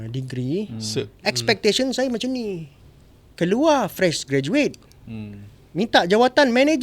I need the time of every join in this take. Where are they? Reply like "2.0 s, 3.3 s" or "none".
2.7 s